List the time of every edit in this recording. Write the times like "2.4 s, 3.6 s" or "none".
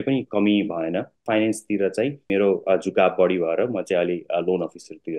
1.2 s, 2.3 s